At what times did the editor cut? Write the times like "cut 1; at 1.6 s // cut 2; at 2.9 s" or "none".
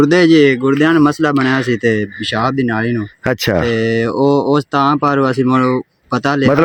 none